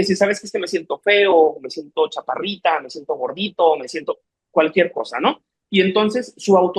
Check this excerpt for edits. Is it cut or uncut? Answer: uncut